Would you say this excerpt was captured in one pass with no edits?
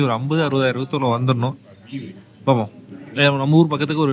yes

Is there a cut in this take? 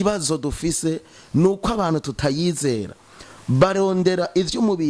no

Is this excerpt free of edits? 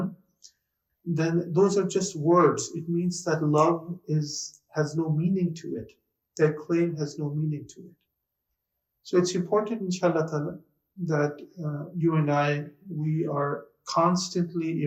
yes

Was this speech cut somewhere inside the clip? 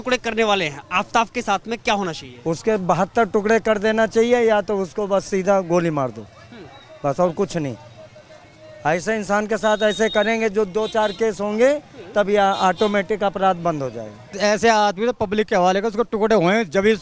no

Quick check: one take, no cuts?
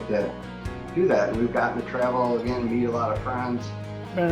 yes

